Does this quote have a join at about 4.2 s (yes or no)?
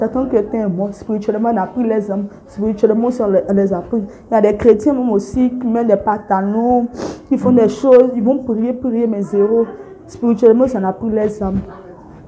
no